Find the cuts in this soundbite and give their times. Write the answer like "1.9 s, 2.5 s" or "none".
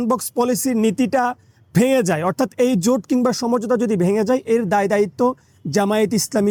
none